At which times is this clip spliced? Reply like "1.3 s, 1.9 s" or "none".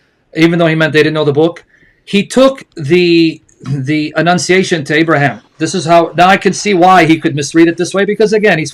none